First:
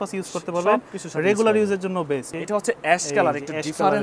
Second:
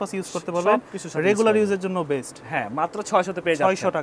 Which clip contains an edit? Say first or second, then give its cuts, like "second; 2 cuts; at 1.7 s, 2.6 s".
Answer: first; 1 cut; at 2.3 s